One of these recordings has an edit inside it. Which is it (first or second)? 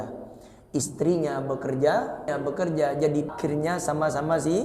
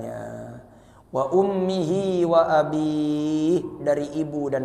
first